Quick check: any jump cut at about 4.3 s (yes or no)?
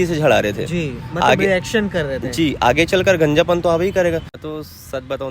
yes